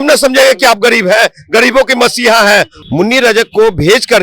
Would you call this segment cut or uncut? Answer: cut